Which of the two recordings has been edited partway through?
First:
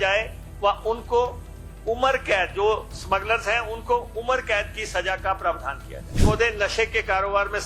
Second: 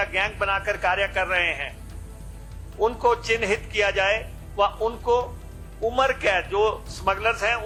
first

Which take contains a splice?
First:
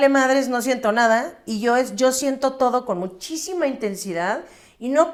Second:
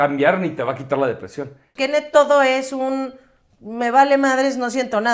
second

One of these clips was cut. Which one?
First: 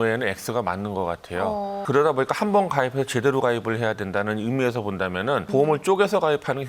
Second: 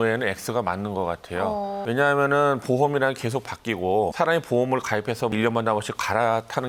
first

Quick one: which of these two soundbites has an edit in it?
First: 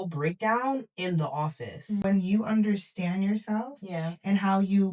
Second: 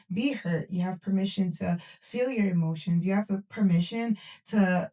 first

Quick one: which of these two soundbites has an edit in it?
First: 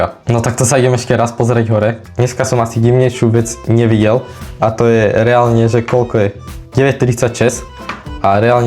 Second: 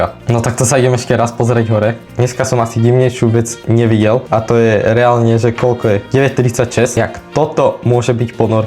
second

